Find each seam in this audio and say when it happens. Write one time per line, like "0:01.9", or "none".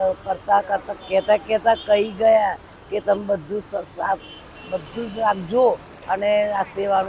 none